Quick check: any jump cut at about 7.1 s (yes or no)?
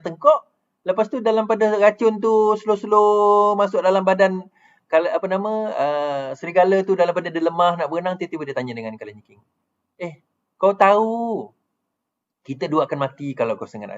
no